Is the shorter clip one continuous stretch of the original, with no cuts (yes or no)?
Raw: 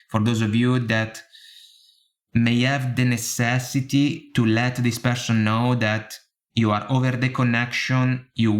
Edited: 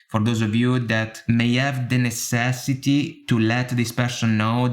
no